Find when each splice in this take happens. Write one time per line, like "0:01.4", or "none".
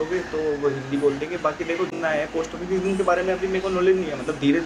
0:02.0